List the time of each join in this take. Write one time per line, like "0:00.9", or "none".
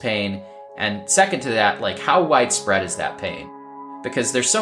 0:03.5